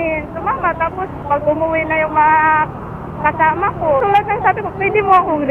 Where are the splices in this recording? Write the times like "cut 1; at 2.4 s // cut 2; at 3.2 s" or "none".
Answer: cut 1; at 1.2 s // cut 2; at 4.0 s